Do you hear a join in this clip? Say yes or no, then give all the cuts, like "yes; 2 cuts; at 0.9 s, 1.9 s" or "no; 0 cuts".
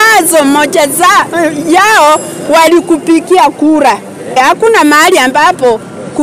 yes; 1 cut; at 4.4 s